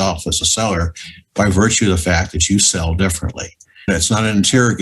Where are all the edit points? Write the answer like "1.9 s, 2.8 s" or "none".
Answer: 3.9 s